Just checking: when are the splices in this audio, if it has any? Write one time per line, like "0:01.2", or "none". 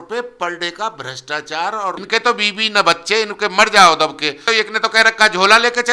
0:02.0
0:04.4